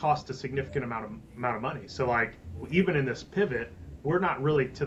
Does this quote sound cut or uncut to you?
uncut